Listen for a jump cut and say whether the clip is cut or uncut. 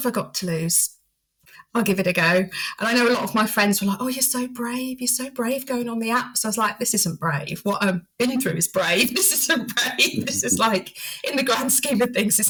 uncut